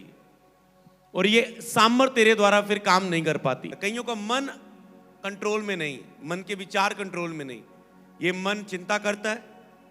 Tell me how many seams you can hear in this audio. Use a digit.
1